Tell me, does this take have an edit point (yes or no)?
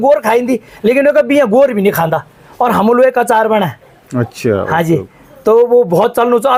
no